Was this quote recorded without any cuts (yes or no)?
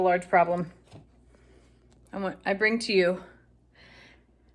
yes